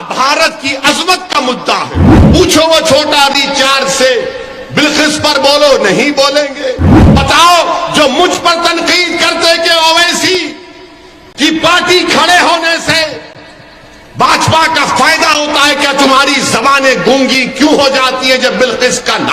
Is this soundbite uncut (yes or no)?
no